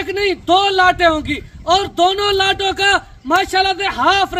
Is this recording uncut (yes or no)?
yes